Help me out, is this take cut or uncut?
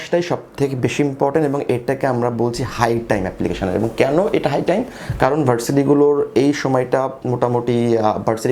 uncut